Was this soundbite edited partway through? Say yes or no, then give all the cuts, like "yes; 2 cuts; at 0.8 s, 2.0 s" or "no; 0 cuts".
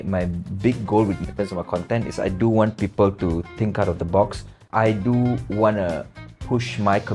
yes; 2 cuts; at 1.2 s, 4.6 s